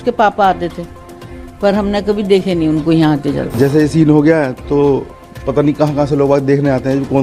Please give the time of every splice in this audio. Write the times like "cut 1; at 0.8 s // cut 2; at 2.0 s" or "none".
cut 1; at 3.5 s